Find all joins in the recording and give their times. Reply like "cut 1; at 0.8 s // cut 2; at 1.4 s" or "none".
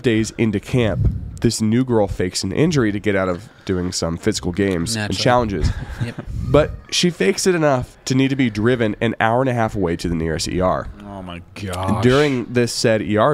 none